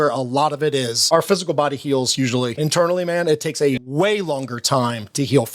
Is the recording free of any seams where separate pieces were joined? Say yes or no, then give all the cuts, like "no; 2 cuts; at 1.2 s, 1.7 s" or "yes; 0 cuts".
no; 3 cuts; at 1.0 s, 2.5 s, 3.9 s